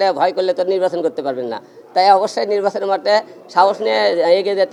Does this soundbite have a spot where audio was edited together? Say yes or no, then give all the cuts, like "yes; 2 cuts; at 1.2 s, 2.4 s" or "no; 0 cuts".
no; 0 cuts